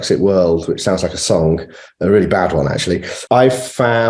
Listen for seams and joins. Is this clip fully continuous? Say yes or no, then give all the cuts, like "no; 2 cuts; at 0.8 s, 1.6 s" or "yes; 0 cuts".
no; 1 cut; at 3.1 s